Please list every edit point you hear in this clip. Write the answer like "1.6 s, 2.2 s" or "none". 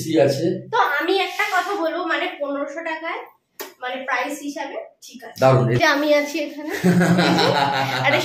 5.8 s